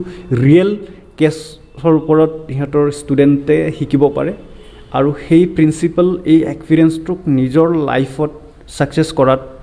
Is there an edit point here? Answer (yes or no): no